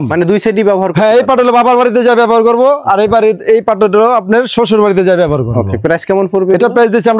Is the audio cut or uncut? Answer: uncut